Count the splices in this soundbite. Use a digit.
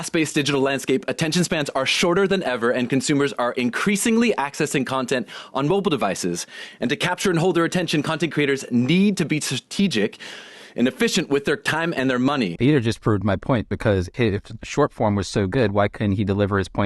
2